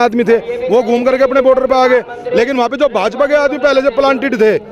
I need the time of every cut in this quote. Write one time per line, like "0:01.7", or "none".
none